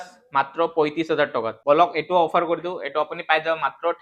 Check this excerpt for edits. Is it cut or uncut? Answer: cut